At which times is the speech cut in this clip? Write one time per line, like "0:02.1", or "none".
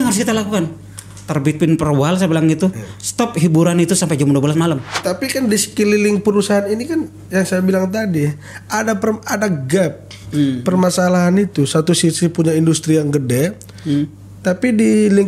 0:05.0